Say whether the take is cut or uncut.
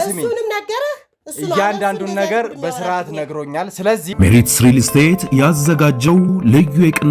cut